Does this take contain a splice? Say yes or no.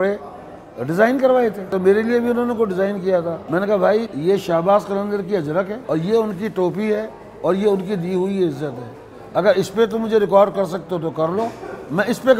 yes